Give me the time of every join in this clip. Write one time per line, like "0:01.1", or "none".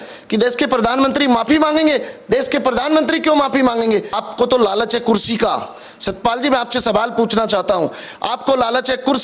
0:04.2